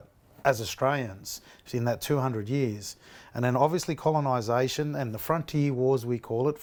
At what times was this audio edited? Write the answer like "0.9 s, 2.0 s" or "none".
none